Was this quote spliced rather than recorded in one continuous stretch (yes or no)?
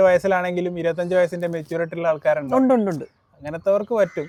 no